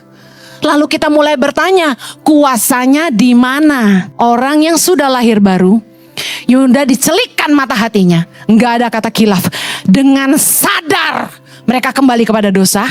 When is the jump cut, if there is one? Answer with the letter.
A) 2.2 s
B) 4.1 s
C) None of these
B